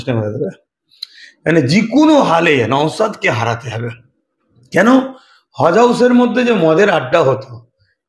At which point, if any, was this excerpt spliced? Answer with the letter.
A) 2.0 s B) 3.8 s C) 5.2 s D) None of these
D